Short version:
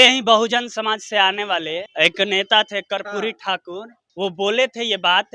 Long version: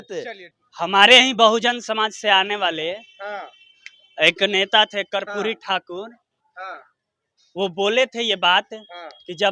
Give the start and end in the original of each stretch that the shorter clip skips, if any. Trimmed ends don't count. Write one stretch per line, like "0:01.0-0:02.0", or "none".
0:03.0-0:04.1
0:06.2-0:07.4